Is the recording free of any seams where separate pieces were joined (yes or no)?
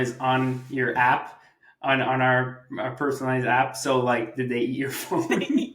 yes